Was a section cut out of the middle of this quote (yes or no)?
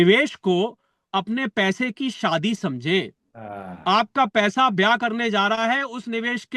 no